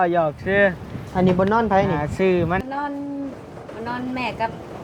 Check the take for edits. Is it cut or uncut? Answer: cut